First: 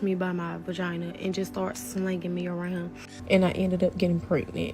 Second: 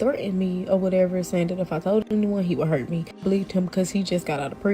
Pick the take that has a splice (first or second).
first